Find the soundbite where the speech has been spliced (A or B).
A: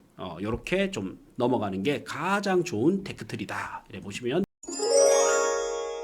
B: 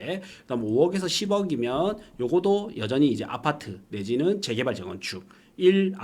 A